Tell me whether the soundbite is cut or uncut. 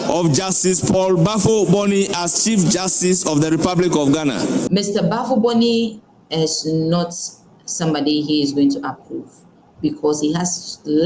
cut